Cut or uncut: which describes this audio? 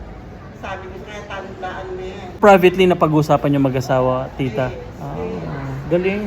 cut